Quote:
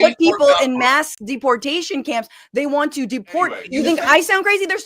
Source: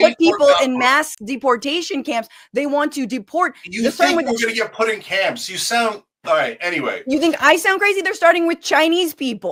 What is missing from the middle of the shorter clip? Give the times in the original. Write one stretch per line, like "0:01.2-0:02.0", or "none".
0:03.6-0:07.0